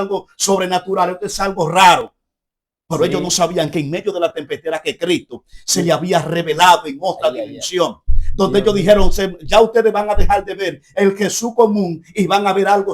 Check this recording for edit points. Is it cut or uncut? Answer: uncut